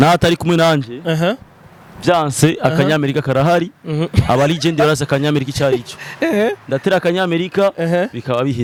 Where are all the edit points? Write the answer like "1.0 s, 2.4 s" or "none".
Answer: none